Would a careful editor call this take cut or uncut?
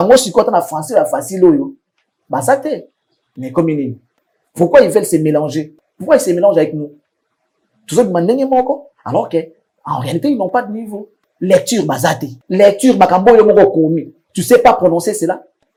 uncut